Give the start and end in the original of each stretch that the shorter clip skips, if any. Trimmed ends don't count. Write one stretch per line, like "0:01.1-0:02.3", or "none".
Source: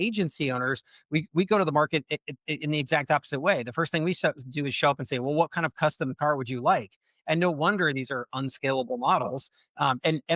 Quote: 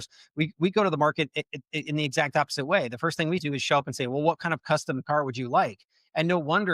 0:04.2-0:04.5

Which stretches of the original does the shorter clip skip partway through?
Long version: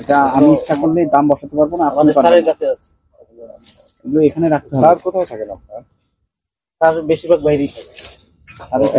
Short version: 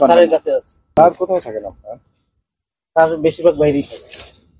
0:03.1-0:04.8

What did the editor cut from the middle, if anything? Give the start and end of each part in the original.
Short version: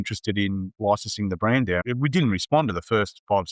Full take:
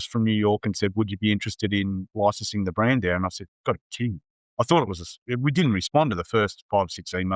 0:03.2-0:05.2

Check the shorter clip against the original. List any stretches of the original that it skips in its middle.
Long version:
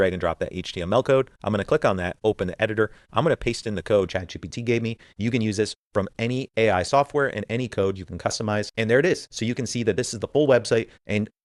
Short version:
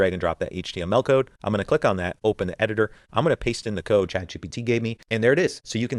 0:05.0-0:08.7

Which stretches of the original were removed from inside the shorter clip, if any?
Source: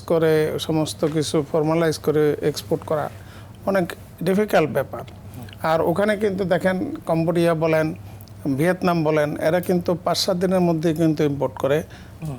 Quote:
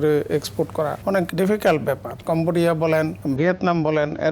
0:03.3-0:04.0
0:05.0-0:06.9
0:08.0-0:08.4

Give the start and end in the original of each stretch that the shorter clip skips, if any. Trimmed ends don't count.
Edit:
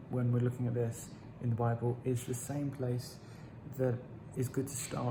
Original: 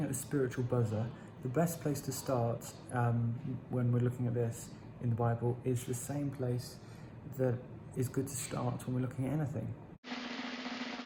none

